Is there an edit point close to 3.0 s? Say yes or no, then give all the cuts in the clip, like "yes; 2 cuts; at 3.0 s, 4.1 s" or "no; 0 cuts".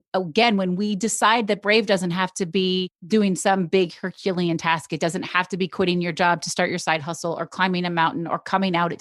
yes; 1 cut; at 3.0 s